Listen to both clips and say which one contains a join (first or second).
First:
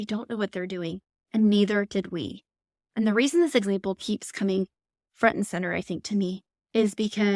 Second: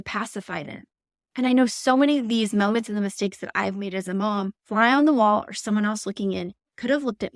second